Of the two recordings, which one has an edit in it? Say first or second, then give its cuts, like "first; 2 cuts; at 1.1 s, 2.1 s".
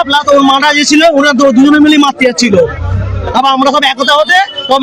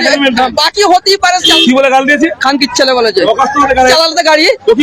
second; 2 cuts; at 1.5 s, 3.9 s